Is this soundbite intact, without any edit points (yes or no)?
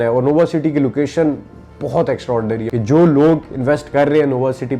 no